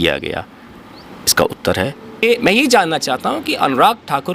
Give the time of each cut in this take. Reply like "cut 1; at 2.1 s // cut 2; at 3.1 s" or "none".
cut 1; at 2.2 s